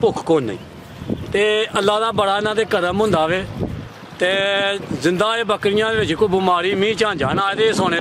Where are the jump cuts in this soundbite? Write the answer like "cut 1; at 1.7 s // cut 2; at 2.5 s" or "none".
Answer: none